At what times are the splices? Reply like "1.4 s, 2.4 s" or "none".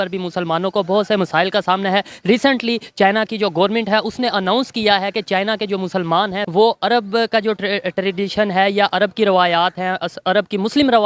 6.4 s